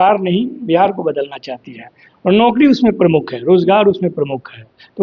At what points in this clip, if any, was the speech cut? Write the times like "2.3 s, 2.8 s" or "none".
none